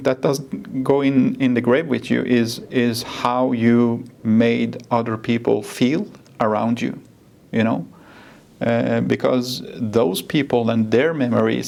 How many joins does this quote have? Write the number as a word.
zero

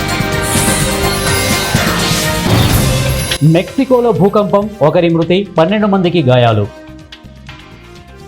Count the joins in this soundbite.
one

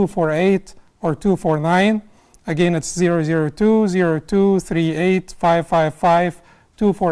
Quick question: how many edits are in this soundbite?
zero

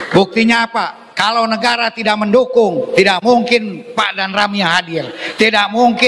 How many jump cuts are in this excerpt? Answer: two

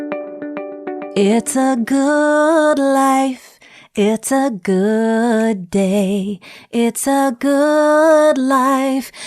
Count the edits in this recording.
one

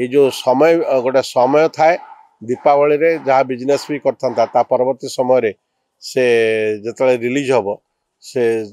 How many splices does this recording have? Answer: zero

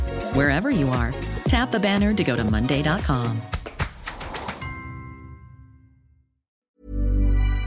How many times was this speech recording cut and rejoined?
one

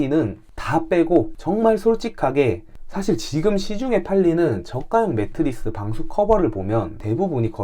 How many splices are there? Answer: two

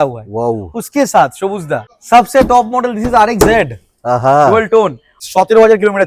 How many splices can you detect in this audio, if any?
two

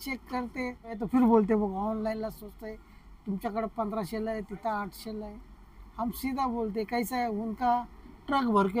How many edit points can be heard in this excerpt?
one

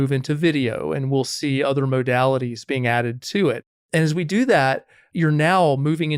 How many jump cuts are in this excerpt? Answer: two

